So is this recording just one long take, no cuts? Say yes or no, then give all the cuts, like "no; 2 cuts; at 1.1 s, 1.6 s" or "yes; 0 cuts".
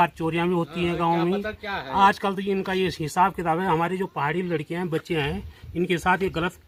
yes; 0 cuts